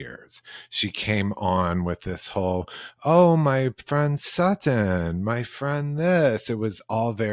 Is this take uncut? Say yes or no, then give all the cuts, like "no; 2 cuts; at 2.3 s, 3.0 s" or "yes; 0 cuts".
yes; 0 cuts